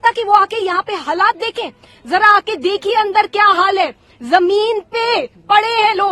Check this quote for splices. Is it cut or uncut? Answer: uncut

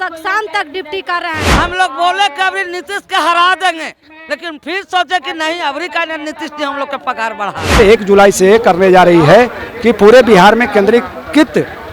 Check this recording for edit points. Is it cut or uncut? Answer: cut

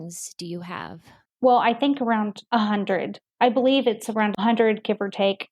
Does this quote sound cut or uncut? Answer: cut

